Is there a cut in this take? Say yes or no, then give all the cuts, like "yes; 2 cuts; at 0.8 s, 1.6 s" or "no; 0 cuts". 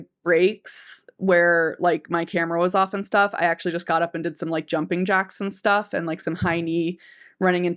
no; 0 cuts